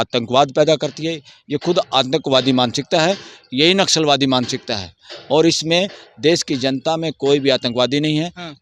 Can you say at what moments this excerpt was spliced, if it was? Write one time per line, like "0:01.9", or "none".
none